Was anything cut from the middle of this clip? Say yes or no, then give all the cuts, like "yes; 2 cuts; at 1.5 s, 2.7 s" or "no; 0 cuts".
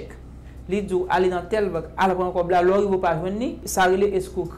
yes; 1 cut; at 3.7 s